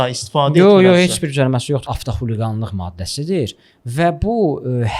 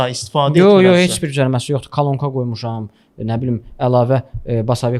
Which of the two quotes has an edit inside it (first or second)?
first